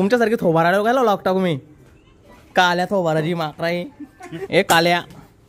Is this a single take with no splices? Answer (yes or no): no